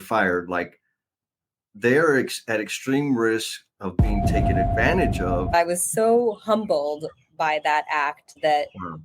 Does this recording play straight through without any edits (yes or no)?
no